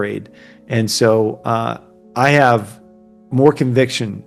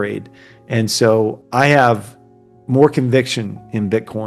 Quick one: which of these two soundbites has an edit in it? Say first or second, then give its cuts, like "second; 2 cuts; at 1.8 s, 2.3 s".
second; 1 cut; at 1.4 s